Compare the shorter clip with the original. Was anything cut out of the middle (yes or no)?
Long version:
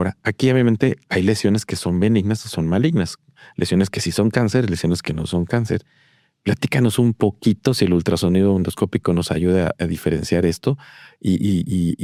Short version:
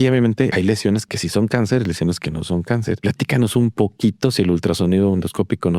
yes